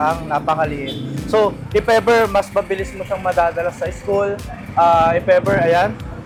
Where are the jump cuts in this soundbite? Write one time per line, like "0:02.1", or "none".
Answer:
none